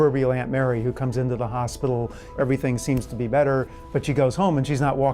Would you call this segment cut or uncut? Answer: cut